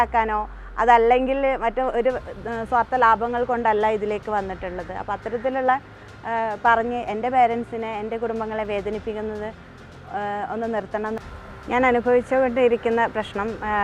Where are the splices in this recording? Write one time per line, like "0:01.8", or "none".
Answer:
0:11.1